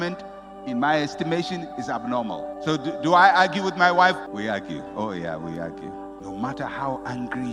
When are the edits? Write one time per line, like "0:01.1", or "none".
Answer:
0:04.3
0:06.2